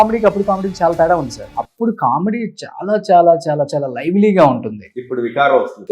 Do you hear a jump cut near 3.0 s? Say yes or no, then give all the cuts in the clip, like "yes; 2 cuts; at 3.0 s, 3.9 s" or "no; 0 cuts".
no; 1 cut; at 1.4 s